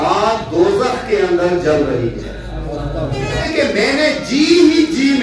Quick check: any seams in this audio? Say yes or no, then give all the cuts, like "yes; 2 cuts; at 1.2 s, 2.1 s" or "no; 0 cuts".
yes; 1 cut; at 3.4 s